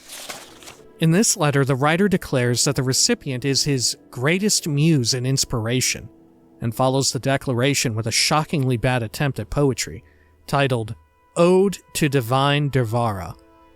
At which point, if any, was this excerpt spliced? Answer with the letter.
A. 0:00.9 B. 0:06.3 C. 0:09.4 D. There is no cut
A